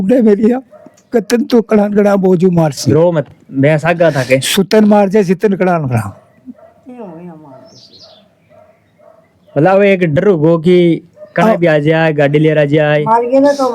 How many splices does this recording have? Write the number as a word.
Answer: zero